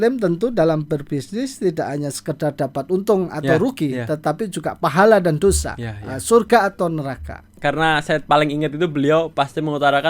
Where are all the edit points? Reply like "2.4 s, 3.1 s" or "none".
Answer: 7.5 s